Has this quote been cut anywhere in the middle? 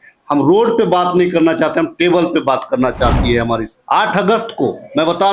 yes; 1 cut; at 3.7 s

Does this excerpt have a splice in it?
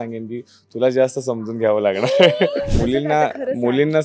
yes; 1 cut; at 2.7 s

